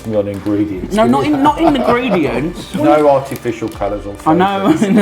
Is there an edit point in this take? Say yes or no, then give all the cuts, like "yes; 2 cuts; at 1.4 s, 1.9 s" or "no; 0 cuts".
yes; 1 cut; at 2.8 s